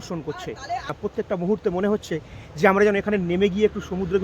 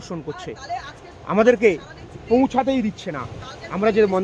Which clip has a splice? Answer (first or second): first